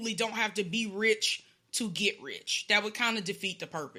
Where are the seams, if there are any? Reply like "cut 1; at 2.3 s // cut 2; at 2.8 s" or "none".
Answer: none